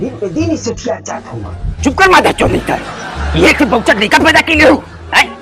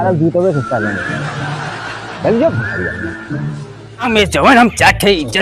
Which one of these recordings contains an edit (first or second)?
second